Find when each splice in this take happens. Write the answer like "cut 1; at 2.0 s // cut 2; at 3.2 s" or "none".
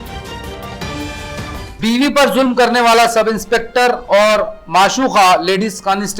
none